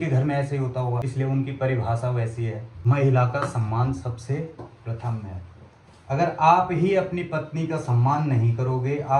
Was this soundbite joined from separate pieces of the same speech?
yes; 2 cuts; at 1.1 s, 2.7 s

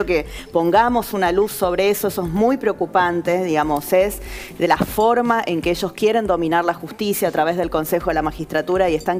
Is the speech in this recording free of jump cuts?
yes; 0 cuts

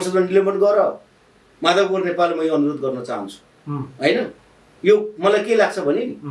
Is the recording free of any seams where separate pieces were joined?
yes; 0 cuts

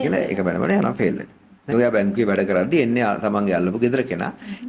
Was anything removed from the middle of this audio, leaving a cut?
yes; 1 cut; at 1.7 s

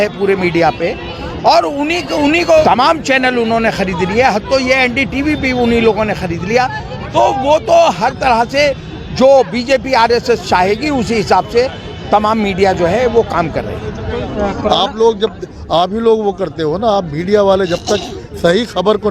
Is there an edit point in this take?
yes; 2 cuts; at 2.6 s, 14.1 s

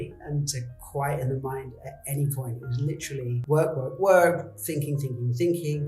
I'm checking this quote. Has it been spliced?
yes; 1 cut; at 3.4 s

